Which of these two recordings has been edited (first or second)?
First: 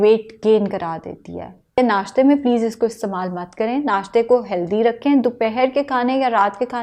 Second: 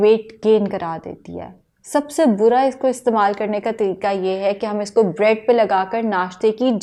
first